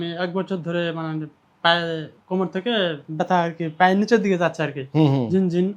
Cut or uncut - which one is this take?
uncut